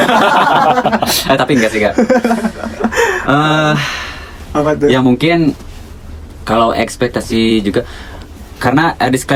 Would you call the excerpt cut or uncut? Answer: uncut